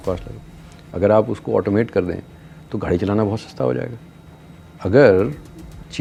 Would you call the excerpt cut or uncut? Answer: uncut